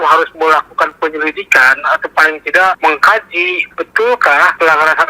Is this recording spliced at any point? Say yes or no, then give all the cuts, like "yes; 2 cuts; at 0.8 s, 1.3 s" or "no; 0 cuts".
yes; 1 cut; at 3.7 s